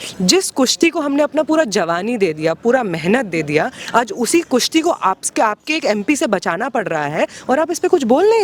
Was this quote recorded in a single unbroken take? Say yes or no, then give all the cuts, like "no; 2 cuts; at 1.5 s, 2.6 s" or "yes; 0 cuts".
yes; 0 cuts